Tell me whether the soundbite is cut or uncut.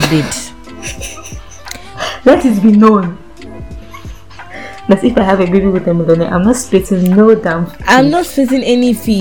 uncut